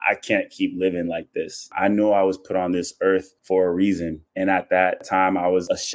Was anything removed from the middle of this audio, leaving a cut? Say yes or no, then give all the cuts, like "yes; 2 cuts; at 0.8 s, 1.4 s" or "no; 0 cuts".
yes; 3 cuts; at 1.7 s, 3.3 s, 4.2 s